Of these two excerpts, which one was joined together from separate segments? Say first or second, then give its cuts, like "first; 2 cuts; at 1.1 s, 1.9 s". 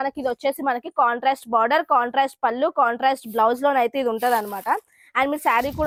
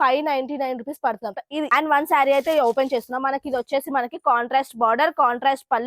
second; 1 cut; at 1.6 s